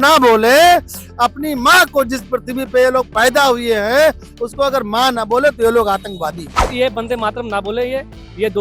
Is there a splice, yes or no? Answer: yes